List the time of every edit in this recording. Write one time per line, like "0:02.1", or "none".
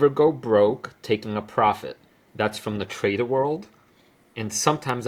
none